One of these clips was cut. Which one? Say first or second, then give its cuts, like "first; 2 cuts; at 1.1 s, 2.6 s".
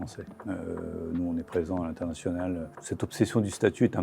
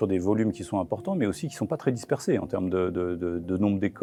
first; 1 cut; at 2.8 s